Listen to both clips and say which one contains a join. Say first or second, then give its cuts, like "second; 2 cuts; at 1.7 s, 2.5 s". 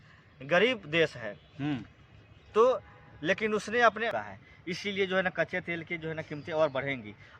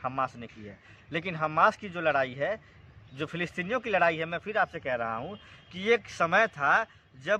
first; 1 cut; at 4.1 s